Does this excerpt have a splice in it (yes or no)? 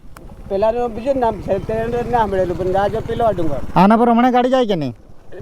no